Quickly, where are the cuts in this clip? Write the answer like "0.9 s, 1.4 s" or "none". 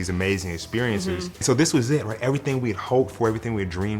1.4 s